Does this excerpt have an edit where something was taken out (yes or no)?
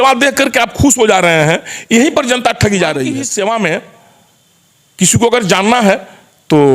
yes